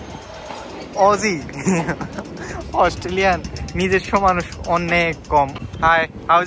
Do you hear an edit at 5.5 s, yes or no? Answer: yes